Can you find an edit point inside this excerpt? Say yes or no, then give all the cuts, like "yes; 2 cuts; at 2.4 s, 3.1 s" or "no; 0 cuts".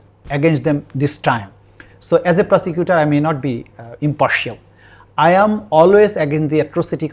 no; 0 cuts